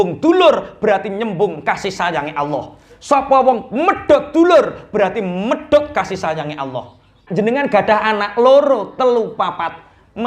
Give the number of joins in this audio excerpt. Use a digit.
1